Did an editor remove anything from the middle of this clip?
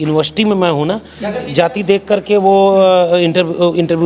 no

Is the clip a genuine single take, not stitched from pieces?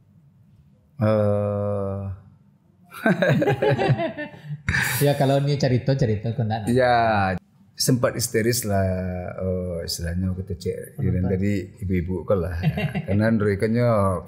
no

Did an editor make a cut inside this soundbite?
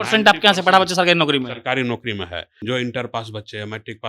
yes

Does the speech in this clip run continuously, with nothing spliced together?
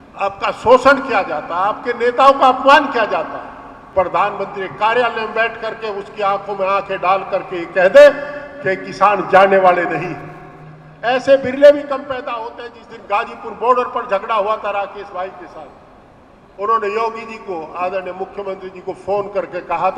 no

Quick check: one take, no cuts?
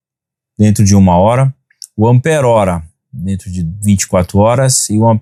yes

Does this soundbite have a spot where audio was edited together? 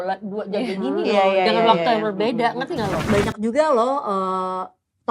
yes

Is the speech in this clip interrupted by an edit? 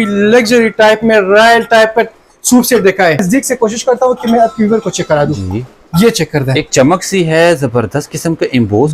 yes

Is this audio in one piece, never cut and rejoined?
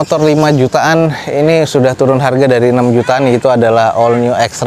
yes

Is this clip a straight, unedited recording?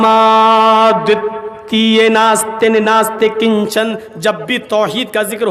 yes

